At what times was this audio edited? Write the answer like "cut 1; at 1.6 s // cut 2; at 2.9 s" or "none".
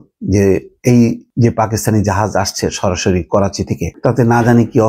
cut 1; at 1.2 s // cut 2; at 3.9 s